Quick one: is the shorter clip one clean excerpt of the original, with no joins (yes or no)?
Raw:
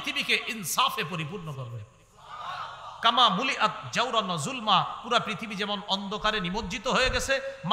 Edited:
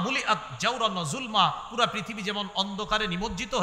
yes